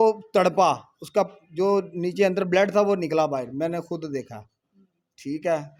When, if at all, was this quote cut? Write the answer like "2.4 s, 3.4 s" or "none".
none